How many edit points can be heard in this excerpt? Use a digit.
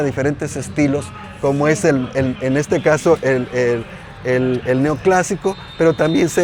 0